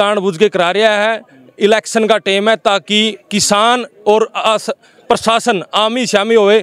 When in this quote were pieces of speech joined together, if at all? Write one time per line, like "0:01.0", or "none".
none

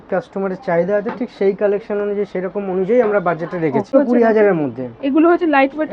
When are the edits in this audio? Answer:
0:03.9

